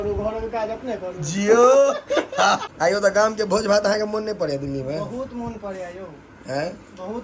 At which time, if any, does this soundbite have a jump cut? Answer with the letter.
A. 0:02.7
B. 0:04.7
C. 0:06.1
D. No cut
A